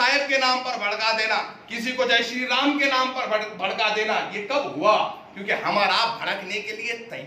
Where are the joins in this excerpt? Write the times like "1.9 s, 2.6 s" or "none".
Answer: none